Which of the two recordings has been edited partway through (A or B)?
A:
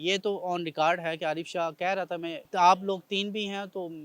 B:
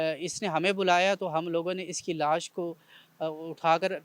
A